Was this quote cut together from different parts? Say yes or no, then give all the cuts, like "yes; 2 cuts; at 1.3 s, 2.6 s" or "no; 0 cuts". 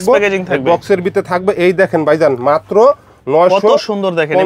no; 0 cuts